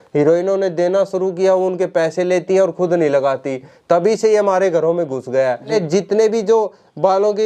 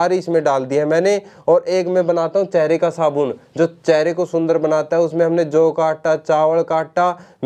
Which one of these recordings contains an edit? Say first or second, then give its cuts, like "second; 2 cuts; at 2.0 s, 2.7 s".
first; 1 cut; at 5.7 s